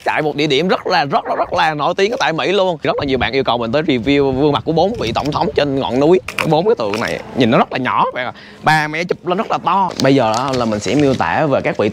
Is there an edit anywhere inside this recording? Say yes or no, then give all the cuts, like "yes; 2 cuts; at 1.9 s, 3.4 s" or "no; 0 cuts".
yes; 3 cuts; at 2.9 s, 6.3 s, 9.9 s